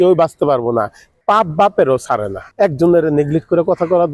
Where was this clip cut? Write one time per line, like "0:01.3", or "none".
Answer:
0:02.4